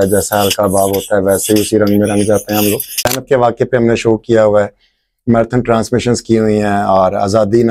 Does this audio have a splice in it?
yes; 1 cut; at 3.1 s

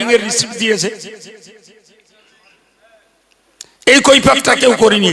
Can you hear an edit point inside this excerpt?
no; 0 cuts

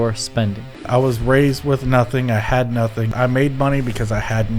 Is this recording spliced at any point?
yes; 2 cuts; at 0.8 s, 3.1 s

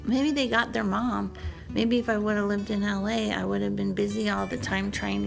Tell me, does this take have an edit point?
no; 0 cuts

